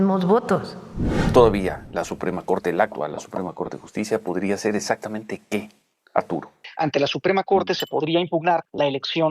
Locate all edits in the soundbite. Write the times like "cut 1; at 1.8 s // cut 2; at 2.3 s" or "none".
cut 1; at 1.1 s // cut 2; at 6.6 s